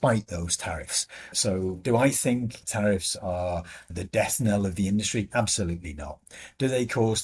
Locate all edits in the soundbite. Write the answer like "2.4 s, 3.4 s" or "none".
none